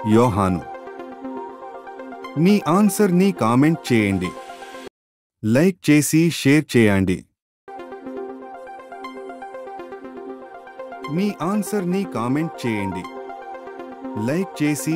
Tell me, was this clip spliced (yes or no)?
no